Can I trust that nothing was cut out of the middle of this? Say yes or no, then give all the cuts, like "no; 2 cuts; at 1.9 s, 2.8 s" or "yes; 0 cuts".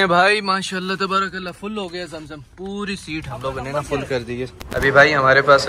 no; 1 cut; at 4.6 s